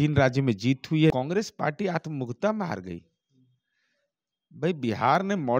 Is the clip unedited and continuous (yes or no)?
no